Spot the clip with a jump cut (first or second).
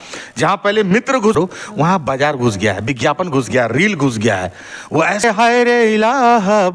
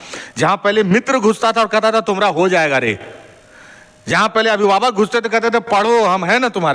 first